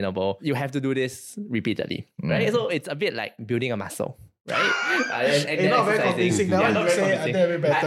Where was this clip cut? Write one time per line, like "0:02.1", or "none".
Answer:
0:02.7